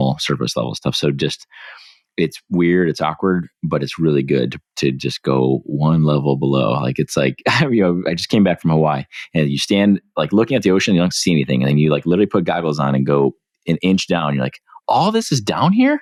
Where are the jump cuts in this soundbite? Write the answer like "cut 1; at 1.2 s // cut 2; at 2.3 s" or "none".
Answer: none